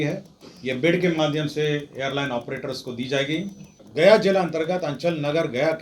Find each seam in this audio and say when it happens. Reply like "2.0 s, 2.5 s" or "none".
3.8 s